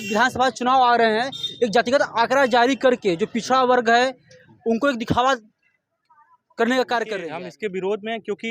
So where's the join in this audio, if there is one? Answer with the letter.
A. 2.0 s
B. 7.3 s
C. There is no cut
B